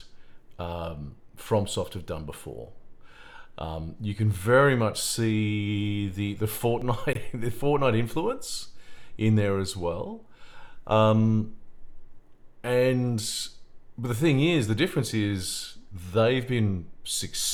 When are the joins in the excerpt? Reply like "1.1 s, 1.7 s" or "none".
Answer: none